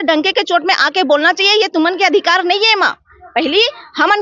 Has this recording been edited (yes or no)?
no